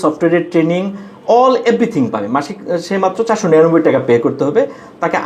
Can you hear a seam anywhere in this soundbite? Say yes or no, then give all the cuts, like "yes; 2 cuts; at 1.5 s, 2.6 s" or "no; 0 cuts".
no; 0 cuts